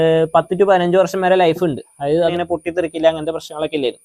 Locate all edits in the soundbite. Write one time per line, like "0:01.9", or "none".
0:02.3